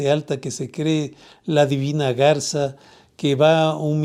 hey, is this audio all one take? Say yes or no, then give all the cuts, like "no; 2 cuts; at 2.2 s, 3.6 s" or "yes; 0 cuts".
yes; 0 cuts